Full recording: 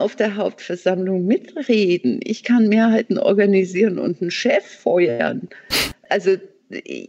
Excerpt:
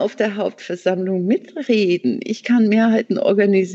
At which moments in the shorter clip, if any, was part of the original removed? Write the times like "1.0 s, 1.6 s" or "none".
none